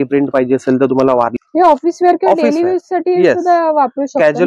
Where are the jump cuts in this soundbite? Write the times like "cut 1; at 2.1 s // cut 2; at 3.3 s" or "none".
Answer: cut 1; at 1.3 s